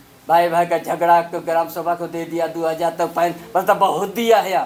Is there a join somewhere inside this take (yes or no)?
no